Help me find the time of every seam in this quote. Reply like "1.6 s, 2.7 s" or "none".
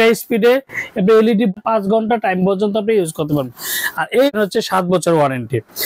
1.5 s, 4.4 s

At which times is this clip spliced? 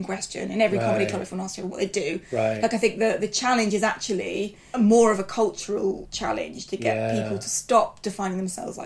4.6 s, 6.1 s

